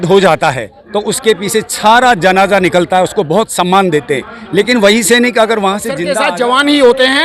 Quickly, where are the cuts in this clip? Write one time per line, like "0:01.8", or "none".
0:06.0